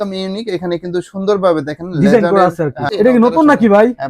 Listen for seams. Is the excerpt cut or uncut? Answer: cut